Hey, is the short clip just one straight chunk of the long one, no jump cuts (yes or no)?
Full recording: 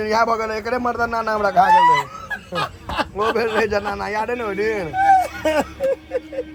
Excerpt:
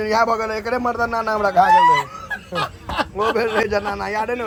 yes